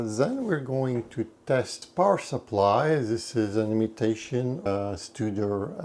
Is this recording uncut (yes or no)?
no